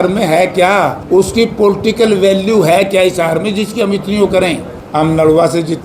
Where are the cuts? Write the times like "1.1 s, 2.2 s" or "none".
1.0 s, 4.7 s